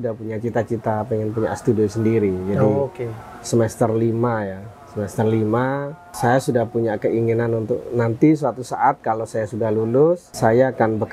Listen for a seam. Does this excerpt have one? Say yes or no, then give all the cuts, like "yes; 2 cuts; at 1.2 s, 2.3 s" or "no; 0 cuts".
no; 0 cuts